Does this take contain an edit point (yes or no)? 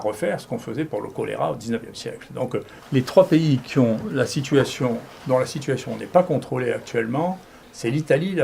yes